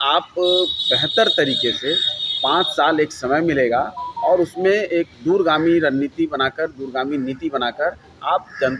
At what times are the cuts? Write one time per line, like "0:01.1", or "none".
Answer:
none